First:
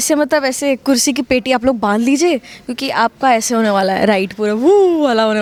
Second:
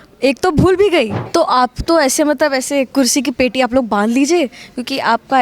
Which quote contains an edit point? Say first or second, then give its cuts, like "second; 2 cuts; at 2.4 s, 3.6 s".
second; 1 cut; at 1.2 s